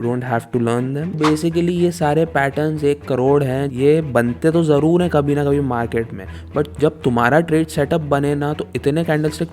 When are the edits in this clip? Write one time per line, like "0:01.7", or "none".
0:01.2
0:03.7